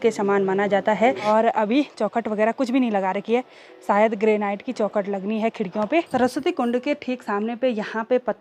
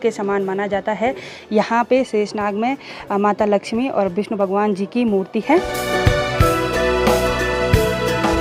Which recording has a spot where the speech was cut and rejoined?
first; 2 cuts; at 1.2 s, 6.1 s

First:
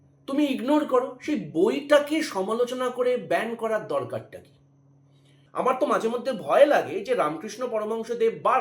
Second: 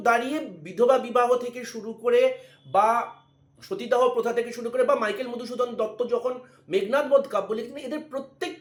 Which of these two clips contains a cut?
first; 1 cut; at 5.4 s

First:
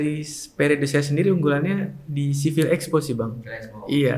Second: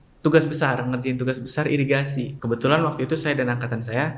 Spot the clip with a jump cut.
second; 1 cut; at 2.3 s

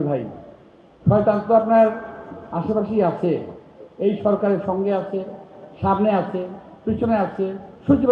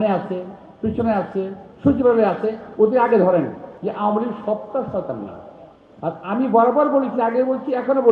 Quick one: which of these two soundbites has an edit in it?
second; 1 cut; at 3.7 s

